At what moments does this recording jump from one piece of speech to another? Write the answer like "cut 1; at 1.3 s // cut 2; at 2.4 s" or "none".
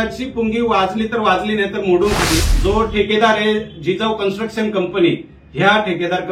cut 1; at 2.4 s